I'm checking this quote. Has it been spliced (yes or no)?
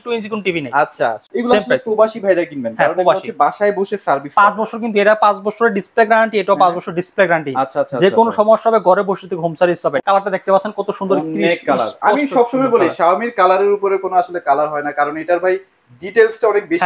yes